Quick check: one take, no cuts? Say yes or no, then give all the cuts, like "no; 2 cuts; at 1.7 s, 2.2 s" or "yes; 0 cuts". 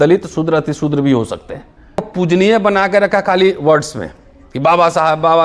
no; 1 cut; at 2.1 s